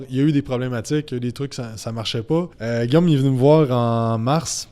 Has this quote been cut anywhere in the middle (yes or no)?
yes